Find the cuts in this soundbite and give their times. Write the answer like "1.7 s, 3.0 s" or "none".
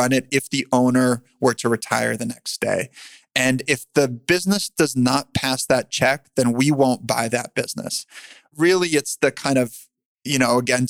8.5 s